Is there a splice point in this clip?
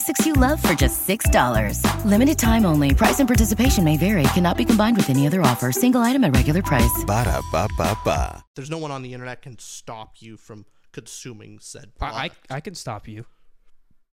yes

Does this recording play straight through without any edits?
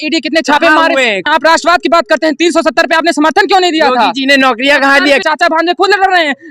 no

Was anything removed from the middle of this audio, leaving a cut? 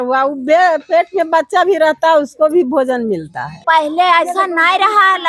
yes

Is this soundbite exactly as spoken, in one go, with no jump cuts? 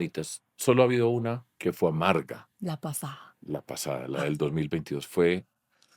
no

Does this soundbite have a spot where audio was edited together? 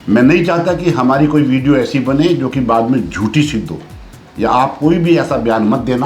no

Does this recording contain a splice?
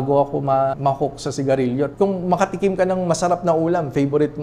yes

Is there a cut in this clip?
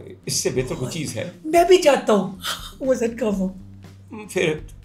no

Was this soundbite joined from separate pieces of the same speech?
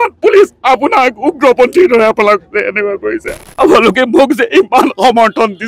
yes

